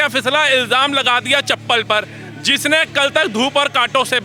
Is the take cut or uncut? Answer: uncut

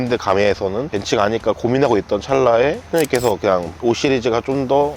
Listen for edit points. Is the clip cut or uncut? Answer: cut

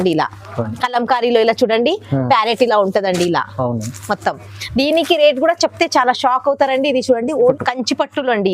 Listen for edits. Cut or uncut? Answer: cut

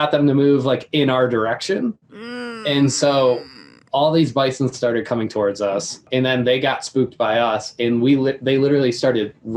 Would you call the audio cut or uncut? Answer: uncut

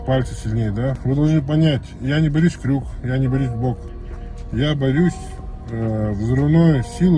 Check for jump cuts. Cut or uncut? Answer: cut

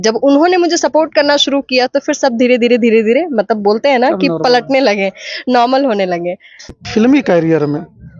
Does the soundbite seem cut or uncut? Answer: cut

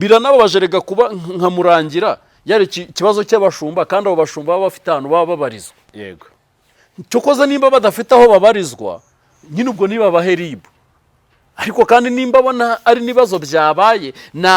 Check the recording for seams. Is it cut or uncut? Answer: uncut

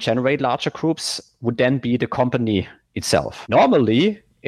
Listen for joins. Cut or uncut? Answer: cut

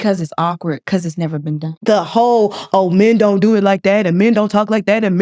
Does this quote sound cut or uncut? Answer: cut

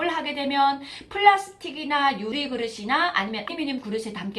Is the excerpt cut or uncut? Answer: cut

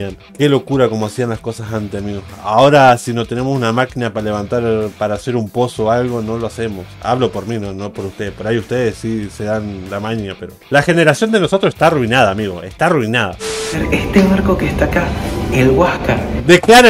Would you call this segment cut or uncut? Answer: cut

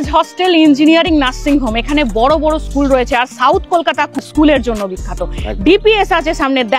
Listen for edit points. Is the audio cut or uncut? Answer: uncut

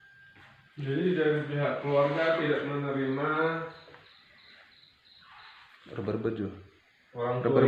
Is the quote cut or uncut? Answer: uncut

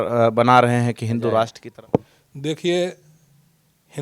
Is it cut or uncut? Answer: cut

